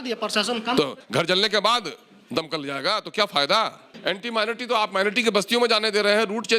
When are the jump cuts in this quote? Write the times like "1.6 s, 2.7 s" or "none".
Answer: 1.0 s, 3.9 s